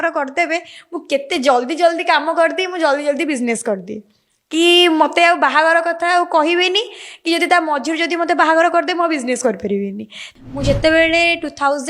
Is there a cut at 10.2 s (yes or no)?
yes